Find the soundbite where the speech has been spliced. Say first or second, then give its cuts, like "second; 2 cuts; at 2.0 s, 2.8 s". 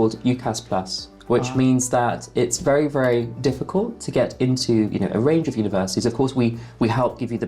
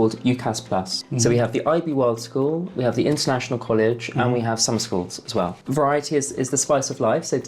second; 2 cuts; at 1.0 s, 5.6 s